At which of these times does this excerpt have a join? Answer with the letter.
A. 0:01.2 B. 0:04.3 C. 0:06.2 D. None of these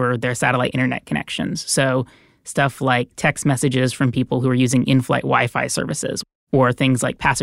C